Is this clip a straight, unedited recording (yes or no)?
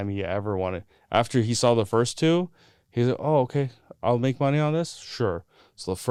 yes